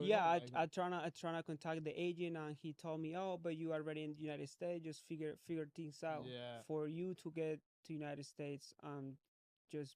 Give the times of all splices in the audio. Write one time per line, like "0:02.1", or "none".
0:06.6

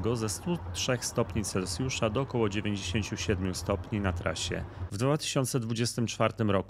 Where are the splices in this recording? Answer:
0:04.8

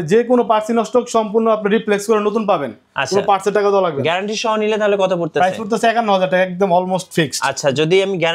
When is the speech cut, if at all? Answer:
none

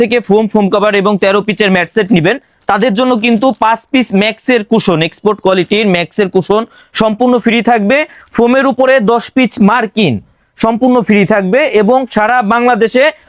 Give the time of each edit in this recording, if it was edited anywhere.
none

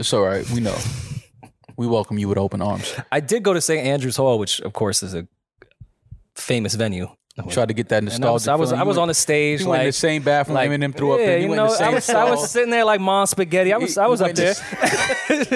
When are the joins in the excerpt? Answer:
0:07.2

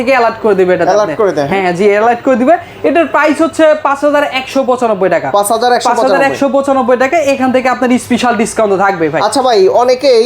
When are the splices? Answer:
none

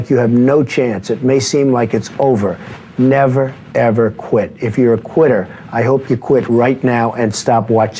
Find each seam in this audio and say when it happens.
none

